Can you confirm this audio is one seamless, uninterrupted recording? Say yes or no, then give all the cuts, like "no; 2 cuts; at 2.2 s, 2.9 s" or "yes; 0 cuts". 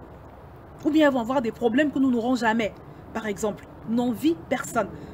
yes; 0 cuts